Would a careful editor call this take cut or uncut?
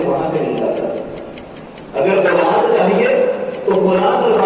uncut